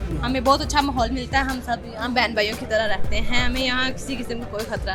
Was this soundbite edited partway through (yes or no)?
no